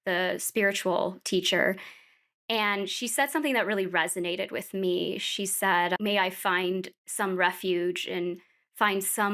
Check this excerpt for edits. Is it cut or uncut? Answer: cut